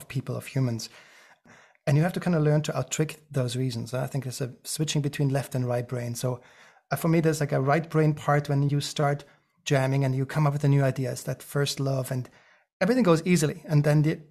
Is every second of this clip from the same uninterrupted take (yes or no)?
no